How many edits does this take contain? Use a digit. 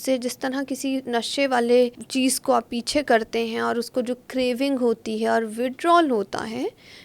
1